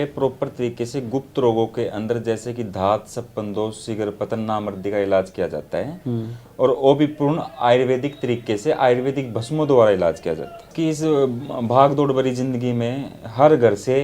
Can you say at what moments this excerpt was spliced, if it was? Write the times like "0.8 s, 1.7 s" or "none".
10.7 s